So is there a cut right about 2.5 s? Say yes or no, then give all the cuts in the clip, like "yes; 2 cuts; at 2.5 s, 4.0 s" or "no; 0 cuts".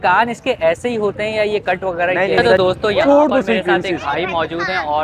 yes; 1 cut; at 2.5 s